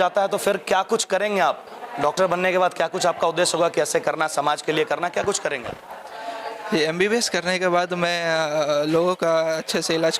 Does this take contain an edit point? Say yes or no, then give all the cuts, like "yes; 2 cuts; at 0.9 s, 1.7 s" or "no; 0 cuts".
no; 0 cuts